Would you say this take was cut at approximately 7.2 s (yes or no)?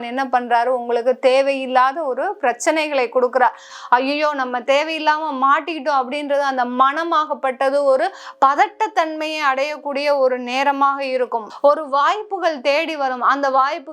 no